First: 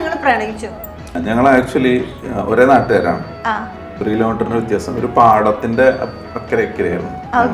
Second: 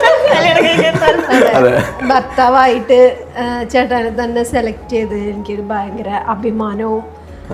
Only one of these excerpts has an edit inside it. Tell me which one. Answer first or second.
first